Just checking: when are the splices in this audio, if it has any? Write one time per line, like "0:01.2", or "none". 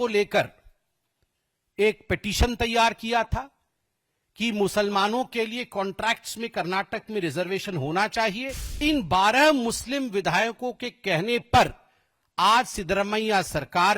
0:08.8